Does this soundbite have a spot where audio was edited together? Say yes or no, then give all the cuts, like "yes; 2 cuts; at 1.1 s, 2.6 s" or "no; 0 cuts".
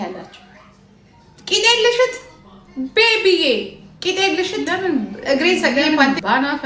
yes; 1 cut; at 5.7 s